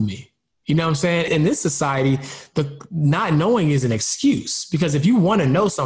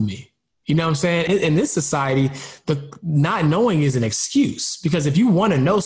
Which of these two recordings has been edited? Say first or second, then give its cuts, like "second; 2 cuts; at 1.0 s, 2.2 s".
first; 1 cut; at 1.3 s